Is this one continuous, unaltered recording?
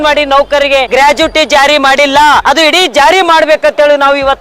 no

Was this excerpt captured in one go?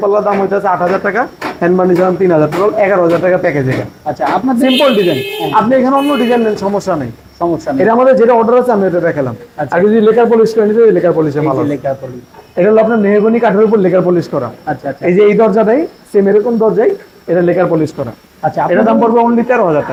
yes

